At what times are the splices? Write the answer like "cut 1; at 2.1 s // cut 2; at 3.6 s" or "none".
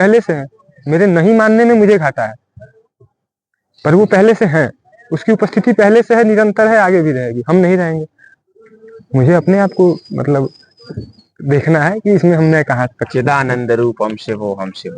none